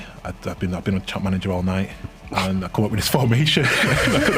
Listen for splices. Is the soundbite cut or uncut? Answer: uncut